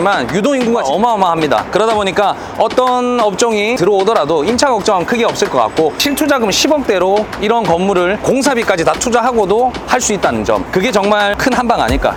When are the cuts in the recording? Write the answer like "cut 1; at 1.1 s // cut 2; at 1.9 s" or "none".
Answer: none